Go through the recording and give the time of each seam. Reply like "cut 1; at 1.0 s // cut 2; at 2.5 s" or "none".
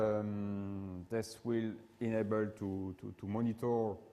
cut 1; at 1.9 s